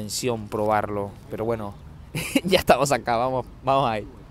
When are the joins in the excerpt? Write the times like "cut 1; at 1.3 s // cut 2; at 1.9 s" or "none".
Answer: none